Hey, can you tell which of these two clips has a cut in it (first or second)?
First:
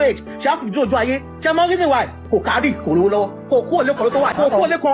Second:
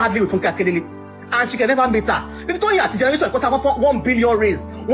first